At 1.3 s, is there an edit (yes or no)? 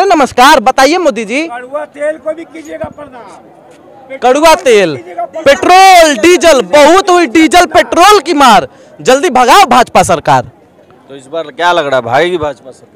no